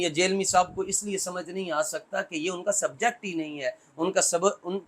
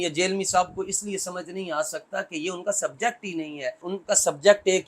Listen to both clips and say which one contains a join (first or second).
second